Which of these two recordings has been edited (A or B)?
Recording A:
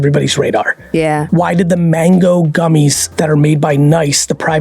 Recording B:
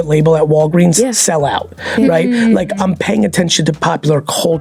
A